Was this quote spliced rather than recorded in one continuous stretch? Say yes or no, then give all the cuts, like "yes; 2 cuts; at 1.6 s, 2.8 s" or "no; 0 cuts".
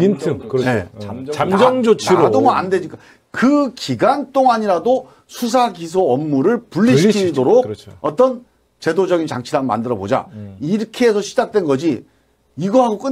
no; 0 cuts